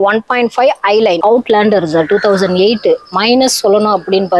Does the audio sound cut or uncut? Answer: cut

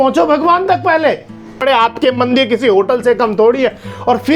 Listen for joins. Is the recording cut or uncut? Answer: cut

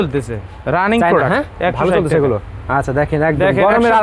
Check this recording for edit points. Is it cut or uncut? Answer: uncut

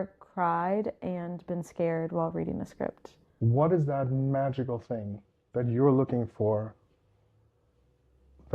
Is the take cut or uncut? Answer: cut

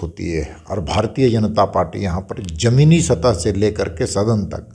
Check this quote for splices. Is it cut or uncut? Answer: uncut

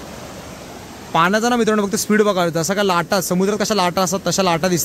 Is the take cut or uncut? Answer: uncut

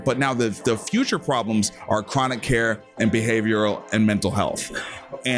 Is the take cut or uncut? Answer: uncut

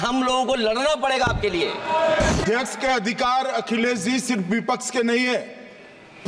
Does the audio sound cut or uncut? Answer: cut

